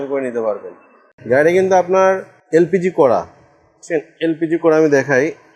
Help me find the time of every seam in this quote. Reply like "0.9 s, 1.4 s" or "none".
1.0 s, 2.3 s

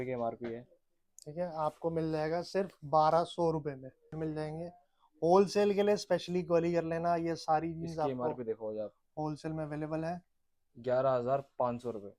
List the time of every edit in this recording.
4.1 s

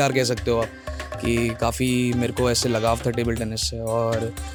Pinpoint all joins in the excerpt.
none

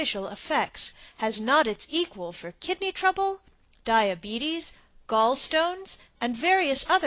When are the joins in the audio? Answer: 6.1 s

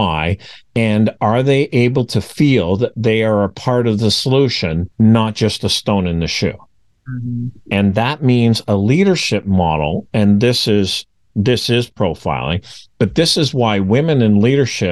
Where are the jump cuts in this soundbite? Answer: none

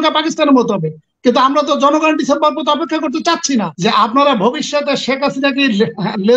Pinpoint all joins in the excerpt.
3.7 s

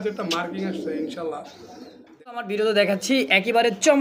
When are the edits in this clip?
2.4 s

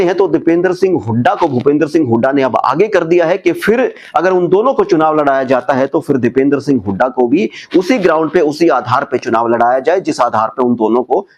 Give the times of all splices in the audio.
none

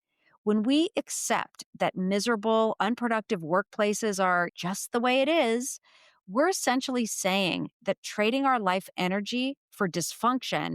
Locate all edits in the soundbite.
4.5 s

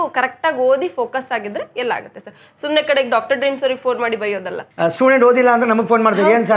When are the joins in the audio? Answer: 4.6 s

